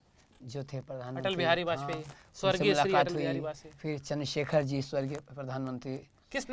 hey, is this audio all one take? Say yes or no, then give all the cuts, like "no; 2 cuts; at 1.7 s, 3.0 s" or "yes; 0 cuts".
yes; 0 cuts